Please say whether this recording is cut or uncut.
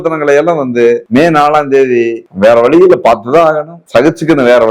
cut